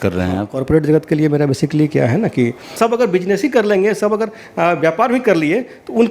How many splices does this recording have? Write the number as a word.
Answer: one